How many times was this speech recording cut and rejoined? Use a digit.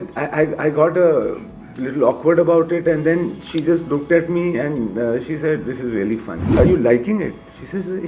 1